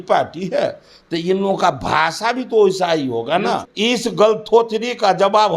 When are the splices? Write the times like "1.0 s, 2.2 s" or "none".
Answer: 3.7 s